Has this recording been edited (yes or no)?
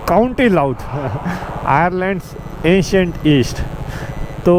no